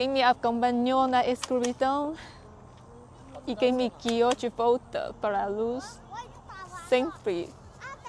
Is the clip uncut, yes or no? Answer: yes